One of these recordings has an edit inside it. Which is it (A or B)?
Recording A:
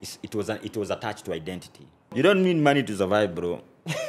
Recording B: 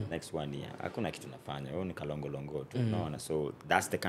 A